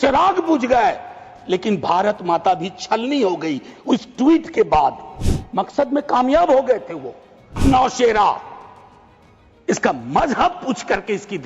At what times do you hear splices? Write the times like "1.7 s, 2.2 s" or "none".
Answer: 7.6 s